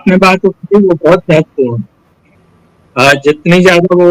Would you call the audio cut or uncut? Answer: cut